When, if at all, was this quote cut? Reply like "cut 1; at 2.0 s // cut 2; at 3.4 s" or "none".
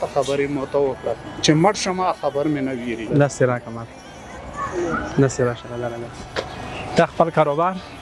cut 1; at 1.3 s // cut 2; at 3.1 s

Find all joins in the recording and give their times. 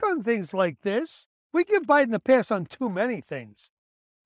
cut 1; at 1.3 s

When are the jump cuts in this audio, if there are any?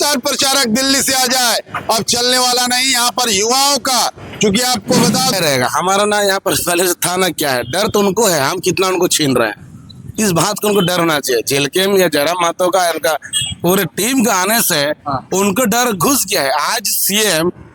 cut 1; at 5.3 s

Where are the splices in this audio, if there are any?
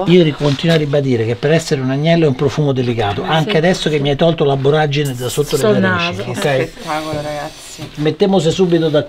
none

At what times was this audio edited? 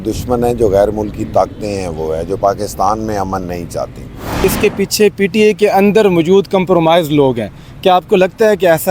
cut 1; at 4.4 s

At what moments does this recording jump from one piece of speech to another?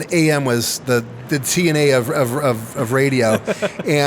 cut 1; at 1.2 s

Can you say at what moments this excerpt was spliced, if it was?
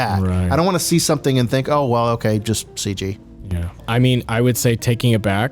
cut 1; at 3.8 s

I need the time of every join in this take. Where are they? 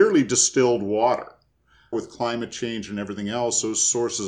cut 1; at 1.9 s

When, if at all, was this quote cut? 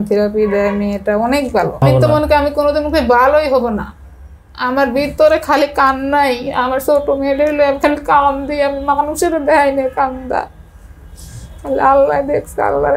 cut 1; at 1.8 s

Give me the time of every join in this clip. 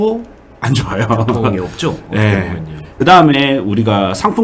cut 1; at 2.8 s

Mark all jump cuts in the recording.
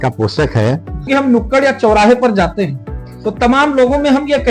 cut 1; at 1.1 s

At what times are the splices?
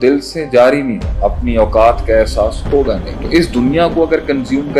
cut 1; at 1.0 s // cut 2; at 3.1 s

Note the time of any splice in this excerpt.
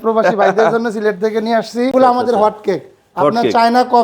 cut 1; at 1.9 s

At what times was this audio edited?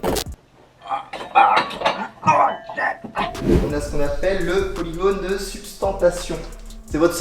cut 1; at 3.5 s

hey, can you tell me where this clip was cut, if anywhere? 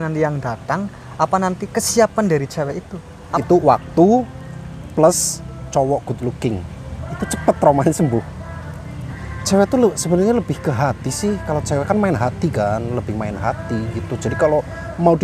cut 1; at 3.2 s // cut 2; at 9.3 s

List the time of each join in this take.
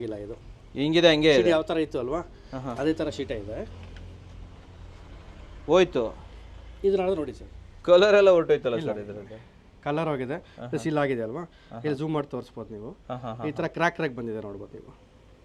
none

